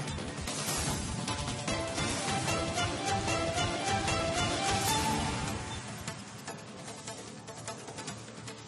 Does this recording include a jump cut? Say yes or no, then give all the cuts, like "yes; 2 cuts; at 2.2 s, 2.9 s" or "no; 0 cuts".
no; 0 cuts